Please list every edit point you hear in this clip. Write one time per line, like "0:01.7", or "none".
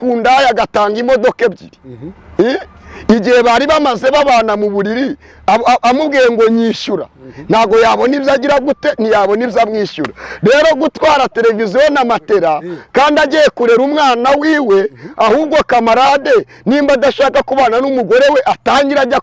none